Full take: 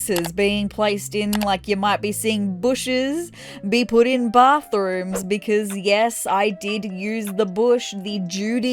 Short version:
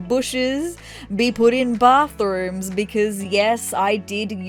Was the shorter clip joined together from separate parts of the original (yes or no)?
no